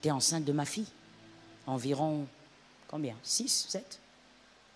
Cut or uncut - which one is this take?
uncut